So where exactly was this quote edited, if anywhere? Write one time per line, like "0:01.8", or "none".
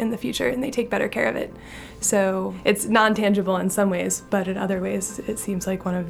0:02.6